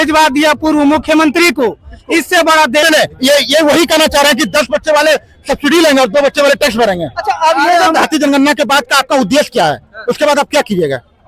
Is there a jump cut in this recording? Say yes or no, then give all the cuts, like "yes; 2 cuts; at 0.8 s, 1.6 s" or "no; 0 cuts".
yes; 2 cuts; at 2.8 s, 8.0 s